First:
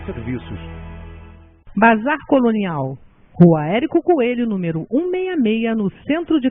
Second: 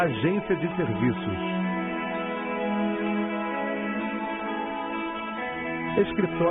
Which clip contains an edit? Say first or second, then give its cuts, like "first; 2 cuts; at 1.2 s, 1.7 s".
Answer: first; 1 cut; at 1.7 s